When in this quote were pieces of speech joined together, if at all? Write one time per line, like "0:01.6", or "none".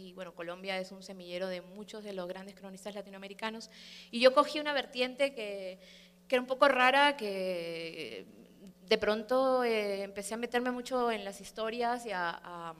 none

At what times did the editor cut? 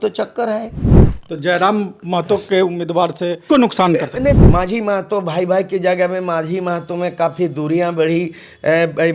0:03.4
0:04.4

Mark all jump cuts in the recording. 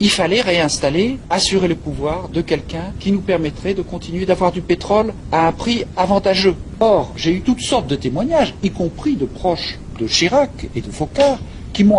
0:06.7

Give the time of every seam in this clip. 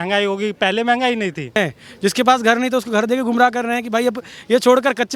0:01.6

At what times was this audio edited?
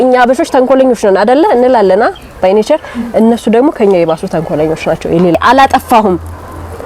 0:05.4

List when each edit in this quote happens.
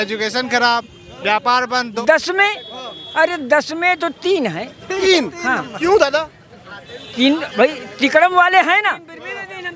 0:01.9

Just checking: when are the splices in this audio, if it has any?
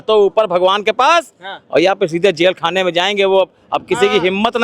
none

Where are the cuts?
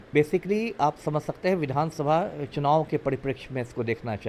none

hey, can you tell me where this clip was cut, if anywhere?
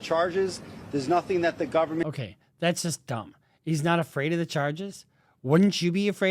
0:02.0

